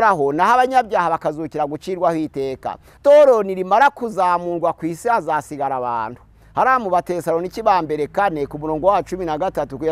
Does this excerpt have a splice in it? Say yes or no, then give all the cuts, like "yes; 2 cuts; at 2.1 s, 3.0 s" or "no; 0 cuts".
yes; 1 cut; at 2.9 s